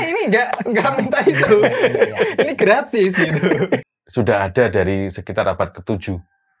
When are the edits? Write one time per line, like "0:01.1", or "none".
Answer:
0:04.0